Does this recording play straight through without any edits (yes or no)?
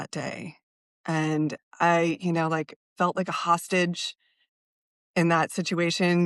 yes